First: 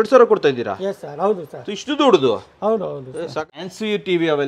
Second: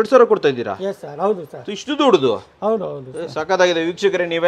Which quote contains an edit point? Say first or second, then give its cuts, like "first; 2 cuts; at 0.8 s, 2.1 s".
first; 1 cut; at 3.4 s